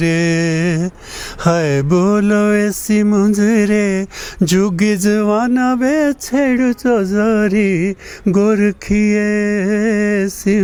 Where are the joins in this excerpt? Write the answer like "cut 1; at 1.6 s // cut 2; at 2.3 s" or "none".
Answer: none